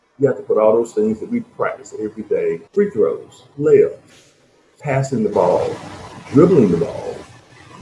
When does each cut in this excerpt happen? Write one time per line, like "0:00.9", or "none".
0:02.6
0:03.4